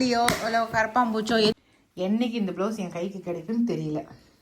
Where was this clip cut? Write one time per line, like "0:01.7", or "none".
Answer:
0:01.5